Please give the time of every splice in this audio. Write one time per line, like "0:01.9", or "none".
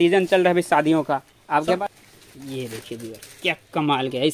0:01.8